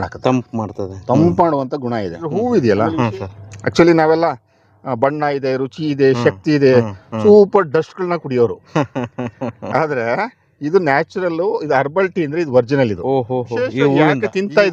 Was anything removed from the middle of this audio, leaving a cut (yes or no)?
yes